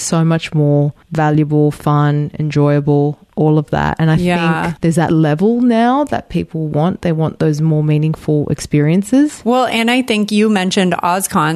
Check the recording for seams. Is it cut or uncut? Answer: cut